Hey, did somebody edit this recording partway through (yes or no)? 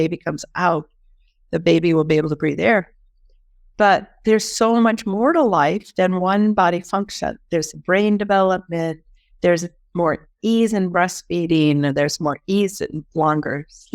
no